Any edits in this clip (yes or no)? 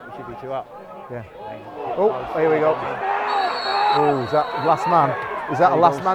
no